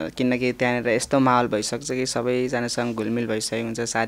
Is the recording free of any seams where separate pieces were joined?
yes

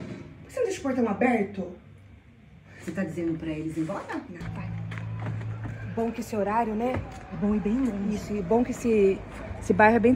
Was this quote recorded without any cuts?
no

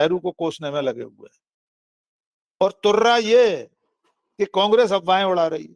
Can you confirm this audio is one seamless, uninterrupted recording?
yes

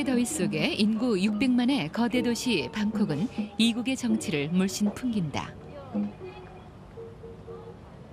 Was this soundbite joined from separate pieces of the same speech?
no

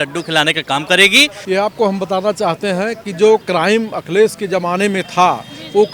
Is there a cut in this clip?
yes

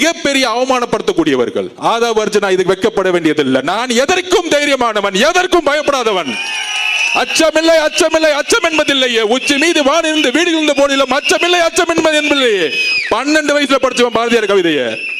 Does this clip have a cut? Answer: no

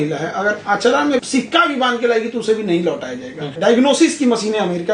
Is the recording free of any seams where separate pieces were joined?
no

